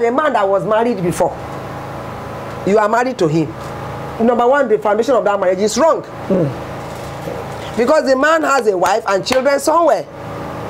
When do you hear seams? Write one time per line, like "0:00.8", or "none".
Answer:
none